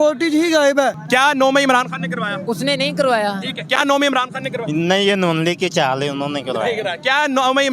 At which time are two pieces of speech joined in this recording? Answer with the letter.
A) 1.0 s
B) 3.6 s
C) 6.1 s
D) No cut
A